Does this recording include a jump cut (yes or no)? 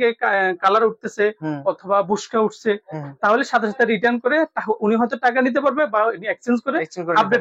no